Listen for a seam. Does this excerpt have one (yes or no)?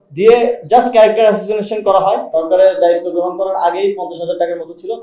yes